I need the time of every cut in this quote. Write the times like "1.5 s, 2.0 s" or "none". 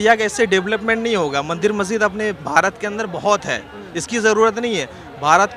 none